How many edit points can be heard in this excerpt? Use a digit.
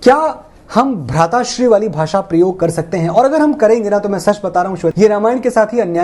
0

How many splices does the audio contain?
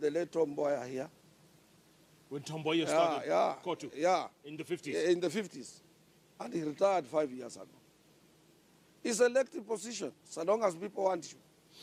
0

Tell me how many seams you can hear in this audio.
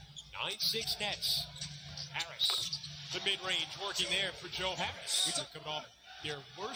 0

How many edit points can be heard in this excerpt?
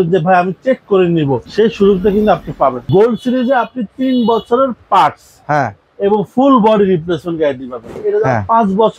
3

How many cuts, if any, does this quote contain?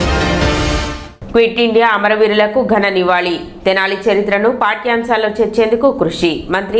1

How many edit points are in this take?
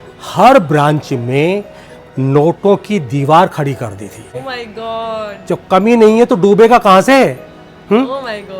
1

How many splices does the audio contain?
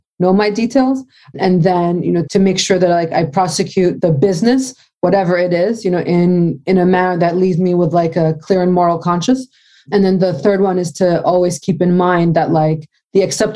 3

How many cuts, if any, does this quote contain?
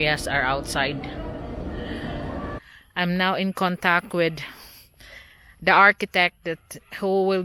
1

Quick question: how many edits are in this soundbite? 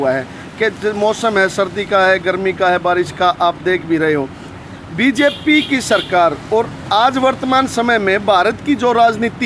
0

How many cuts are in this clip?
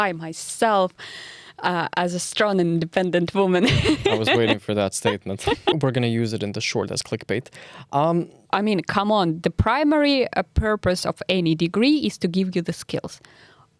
2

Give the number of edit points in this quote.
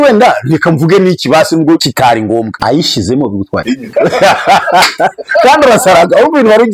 2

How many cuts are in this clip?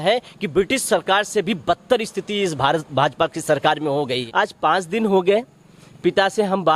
1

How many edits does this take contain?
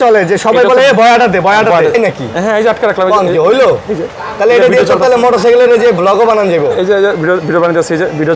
1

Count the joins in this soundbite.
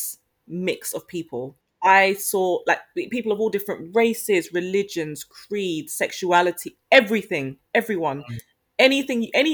1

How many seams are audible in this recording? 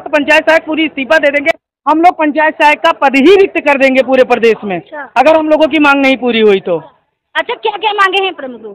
0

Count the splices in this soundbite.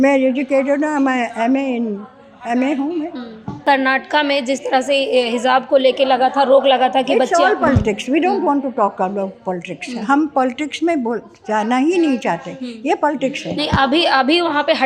1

